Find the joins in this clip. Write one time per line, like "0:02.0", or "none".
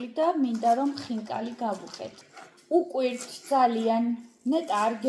0:02.2